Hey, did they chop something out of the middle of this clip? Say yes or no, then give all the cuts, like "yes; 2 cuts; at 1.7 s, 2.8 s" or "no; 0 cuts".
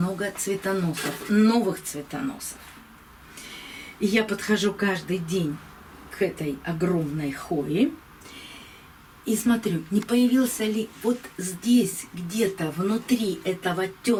no; 0 cuts